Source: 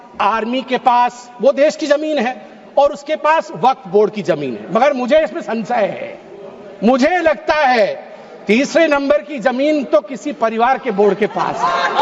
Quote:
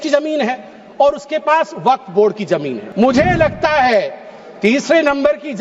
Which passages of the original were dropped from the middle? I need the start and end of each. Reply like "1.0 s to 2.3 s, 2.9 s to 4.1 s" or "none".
4.6 s to 6.6 s